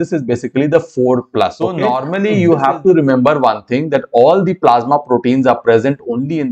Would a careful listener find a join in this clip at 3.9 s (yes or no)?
no